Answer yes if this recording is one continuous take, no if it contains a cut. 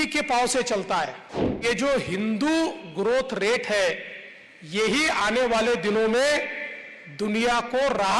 no